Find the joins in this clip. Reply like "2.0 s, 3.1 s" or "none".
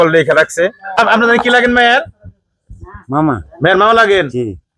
1.0 s